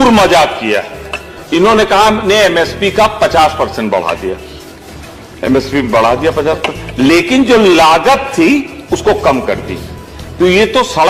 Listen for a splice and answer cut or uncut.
uncut